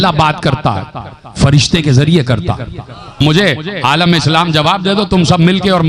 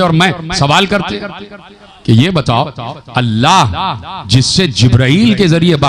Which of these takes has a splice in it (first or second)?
first